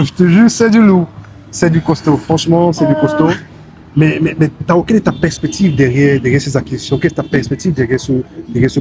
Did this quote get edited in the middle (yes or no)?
no